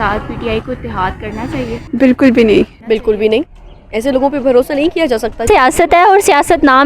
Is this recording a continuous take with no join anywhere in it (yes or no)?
no